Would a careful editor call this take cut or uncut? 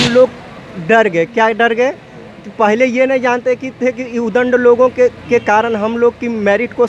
uncut